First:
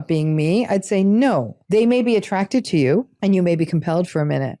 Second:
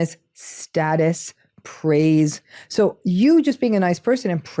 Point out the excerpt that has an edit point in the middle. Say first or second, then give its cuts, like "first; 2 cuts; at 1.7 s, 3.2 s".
first; 2 cuts; at 1.5 s, 3.1 s